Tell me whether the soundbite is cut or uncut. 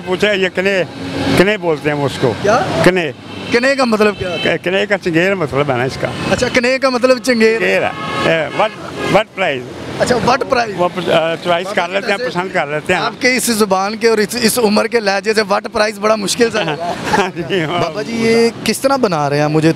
cut